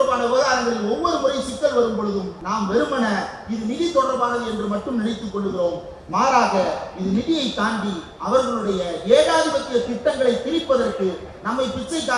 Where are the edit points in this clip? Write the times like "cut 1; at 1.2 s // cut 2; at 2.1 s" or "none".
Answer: cut 1; at 2.4 s